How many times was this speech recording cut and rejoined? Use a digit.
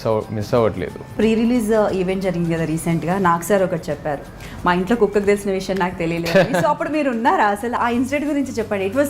2